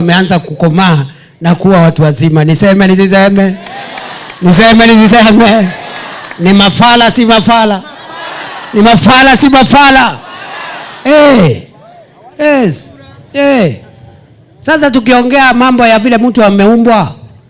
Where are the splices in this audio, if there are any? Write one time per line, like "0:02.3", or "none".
none